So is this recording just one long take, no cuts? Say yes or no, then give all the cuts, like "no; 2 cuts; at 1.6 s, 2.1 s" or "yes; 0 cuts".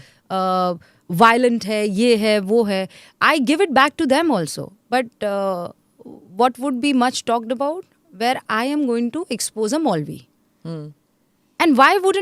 yes; 0 cuts